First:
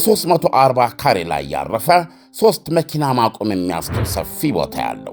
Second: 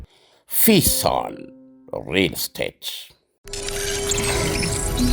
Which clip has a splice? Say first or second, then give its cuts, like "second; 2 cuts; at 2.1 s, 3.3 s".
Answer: second; 1 cut; at 3.5 s